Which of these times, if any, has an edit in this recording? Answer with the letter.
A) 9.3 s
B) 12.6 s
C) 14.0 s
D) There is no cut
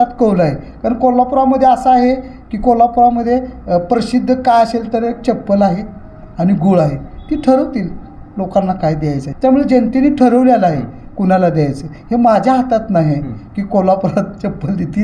A